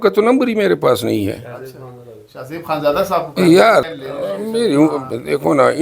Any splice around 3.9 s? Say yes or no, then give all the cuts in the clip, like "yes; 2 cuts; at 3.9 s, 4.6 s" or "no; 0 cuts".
yes; 1 cut; at 3.9 s